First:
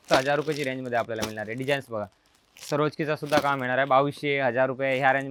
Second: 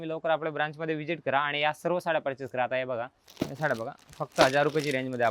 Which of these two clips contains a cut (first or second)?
second